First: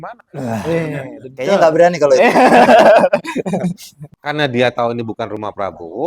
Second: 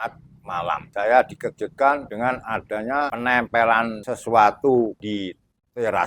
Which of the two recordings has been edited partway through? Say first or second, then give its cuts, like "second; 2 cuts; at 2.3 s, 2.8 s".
second; 5 cuts; at 0.9 s, 2.1 s, 3.1 s, 4.0 s, 5.0 s